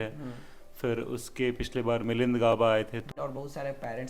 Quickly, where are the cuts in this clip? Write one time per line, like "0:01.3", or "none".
0:03.0